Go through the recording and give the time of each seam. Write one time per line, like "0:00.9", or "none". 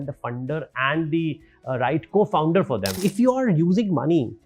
0:03.0